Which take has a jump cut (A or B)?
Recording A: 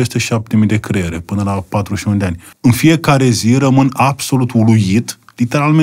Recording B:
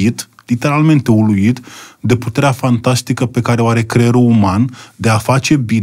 A